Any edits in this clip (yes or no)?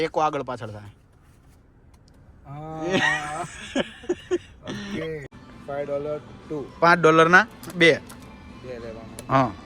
yes